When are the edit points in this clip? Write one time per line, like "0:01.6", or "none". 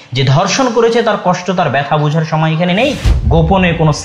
0:03.1